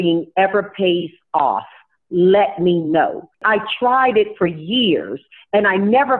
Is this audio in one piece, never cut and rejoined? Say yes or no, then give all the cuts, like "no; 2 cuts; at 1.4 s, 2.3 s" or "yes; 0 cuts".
no; 1 cut; at 3.4 s